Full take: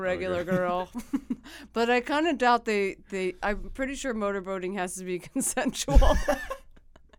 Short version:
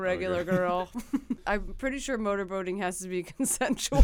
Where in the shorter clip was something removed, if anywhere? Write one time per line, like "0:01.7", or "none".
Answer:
0:01.4